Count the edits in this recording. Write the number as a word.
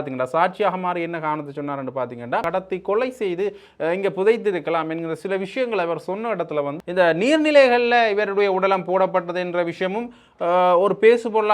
two